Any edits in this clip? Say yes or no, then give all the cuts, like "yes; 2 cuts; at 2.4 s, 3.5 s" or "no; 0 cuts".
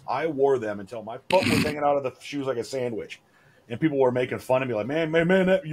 yes; 1 cut; at 1.2 s